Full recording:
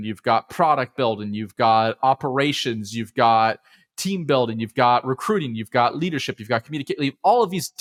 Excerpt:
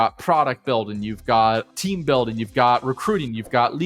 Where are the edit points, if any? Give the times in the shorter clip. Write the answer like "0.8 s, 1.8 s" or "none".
1.6 s